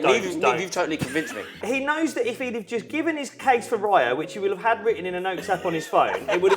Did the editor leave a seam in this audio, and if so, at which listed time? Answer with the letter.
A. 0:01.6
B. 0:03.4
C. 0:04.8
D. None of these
A